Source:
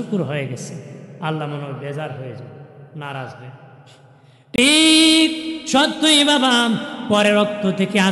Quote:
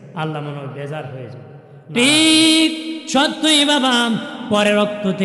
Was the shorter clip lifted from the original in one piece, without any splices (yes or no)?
no